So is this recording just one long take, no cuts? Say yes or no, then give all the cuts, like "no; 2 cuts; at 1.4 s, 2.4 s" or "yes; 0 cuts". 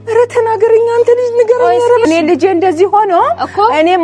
no; 1 cut; at 2.0 s